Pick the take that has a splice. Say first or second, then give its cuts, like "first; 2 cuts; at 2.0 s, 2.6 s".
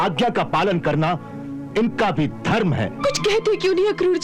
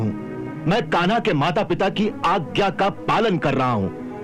first; 1 cut; at 3.0 s